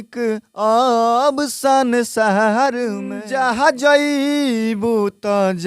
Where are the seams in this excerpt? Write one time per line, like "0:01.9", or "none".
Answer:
0:03.2